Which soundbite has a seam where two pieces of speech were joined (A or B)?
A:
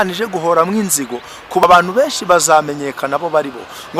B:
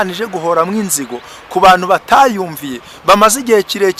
A